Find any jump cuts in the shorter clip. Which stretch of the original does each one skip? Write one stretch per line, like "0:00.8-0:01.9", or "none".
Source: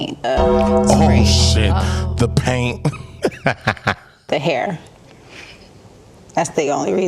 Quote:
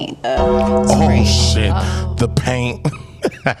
none